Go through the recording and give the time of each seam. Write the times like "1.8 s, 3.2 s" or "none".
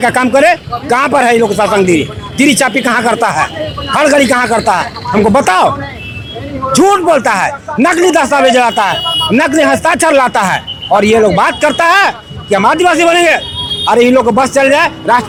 none

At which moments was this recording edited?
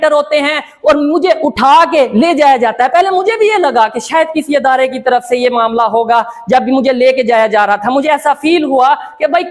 none

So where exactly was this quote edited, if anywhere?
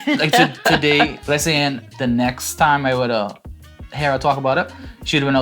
1.2 s

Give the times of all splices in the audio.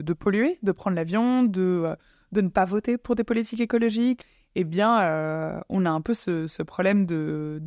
4.3 s

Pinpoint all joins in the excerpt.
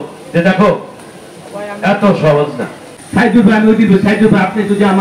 2.9 s

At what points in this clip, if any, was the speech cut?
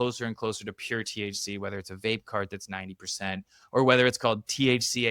none

